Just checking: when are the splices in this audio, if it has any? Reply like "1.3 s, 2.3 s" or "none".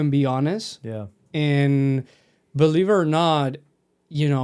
none